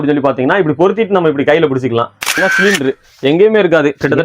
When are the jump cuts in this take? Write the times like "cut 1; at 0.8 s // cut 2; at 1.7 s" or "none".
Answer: cut 1; at 2.3 s